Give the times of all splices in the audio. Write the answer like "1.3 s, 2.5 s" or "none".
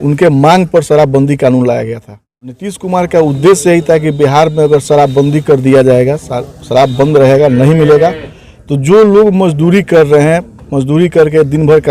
2.7 s